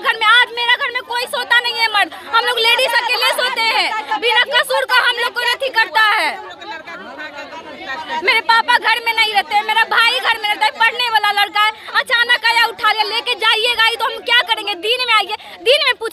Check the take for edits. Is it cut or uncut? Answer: uncut